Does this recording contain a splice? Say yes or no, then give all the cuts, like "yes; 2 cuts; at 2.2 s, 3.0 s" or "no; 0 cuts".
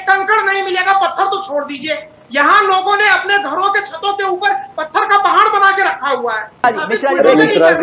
yes; 1 cut; at 6.6 s